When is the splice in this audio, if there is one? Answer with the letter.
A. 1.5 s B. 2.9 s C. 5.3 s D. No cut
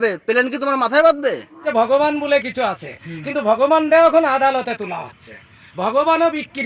A